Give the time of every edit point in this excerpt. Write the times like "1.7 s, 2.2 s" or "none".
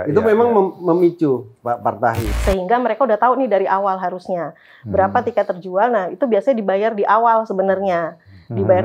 2.3 s

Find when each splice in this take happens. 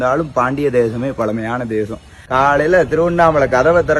2.2 s

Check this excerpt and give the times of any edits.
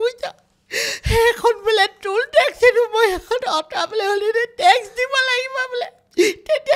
none

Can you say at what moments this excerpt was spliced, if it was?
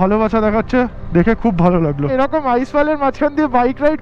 2.1 s

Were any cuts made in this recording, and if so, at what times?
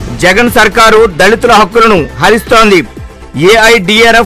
none

